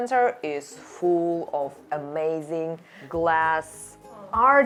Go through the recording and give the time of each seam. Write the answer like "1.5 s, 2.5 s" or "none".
none